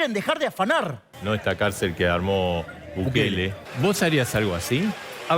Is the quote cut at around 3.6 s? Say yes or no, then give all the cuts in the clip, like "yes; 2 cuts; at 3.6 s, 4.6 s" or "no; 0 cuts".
yes; 2 cuts; at 1.1 s, 3.6 s